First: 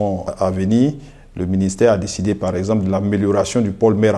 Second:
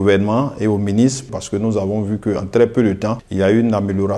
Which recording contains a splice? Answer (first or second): second